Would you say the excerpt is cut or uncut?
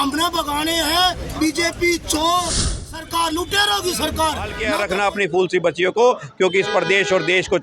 cut